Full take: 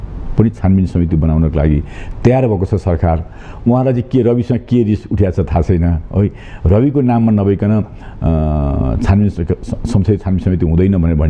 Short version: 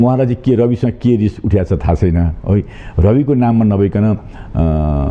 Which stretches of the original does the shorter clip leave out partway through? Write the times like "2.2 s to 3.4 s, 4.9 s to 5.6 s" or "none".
none